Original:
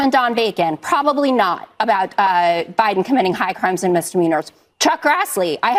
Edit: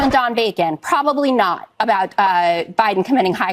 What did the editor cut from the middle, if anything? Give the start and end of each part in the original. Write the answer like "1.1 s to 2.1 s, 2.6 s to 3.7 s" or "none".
none